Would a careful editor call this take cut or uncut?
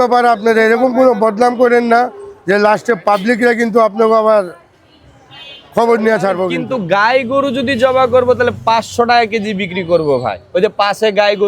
cut